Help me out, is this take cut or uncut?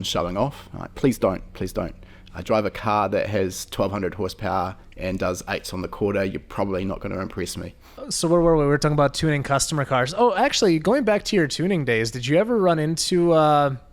uncut